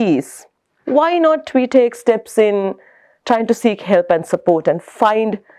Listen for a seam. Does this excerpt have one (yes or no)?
no